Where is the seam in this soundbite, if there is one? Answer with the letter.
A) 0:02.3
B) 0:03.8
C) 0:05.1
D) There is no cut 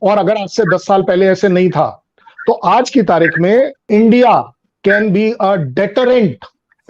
B